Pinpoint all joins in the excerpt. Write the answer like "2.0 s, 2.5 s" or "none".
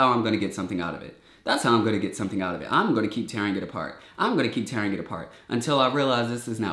none